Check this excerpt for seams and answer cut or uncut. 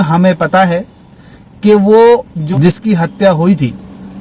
cut